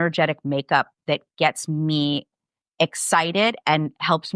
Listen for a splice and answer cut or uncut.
uncut